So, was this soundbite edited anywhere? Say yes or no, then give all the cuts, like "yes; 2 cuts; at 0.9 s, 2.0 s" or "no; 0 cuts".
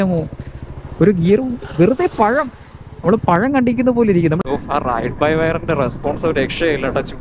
yes; 1 cut; at 4.4 s